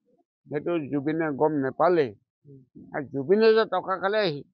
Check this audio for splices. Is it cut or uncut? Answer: uncut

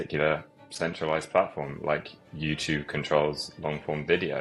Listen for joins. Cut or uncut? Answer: uncut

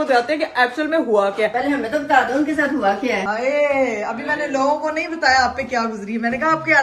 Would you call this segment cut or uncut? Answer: cut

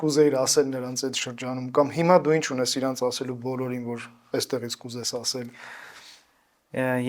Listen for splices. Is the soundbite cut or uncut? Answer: uncut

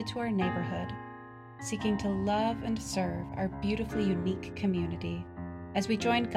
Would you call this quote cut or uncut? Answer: uncut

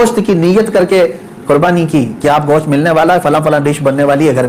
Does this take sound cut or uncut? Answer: uncut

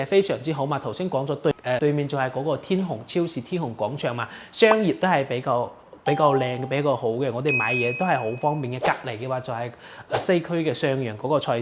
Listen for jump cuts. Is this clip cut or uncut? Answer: uncut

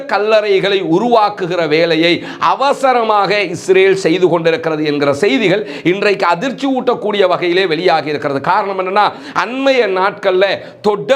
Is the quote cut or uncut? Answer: uncut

